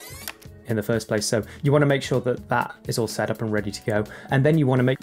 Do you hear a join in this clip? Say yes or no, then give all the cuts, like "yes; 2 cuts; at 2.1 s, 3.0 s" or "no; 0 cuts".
yes; 2 cuts; at 1.5 s, 2.8 s